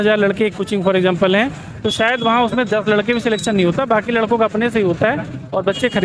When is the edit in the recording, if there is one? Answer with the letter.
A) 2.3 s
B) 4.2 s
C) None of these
C